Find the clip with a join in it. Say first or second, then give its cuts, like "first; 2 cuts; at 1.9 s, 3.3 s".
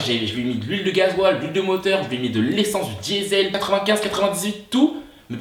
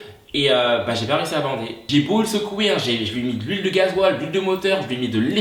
second; 1 cut; at 1.9 s